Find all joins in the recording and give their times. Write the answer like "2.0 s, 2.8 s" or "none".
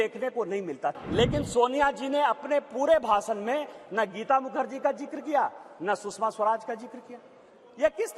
1.0 s